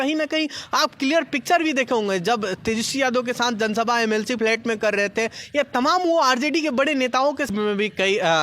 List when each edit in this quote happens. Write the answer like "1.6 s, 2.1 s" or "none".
7.5 s